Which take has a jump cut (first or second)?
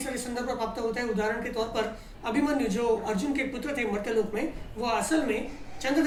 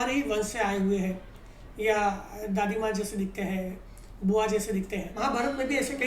second